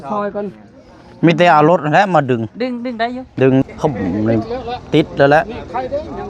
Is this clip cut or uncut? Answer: cut